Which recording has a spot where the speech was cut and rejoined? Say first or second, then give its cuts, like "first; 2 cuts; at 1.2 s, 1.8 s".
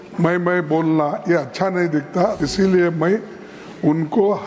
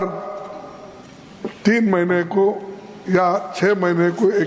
first; 1 cut; at 2.4 s